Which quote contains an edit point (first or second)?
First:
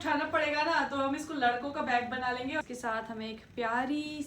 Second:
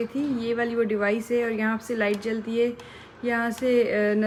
first